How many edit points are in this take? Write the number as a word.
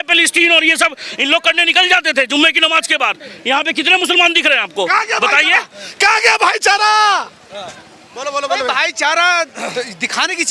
zero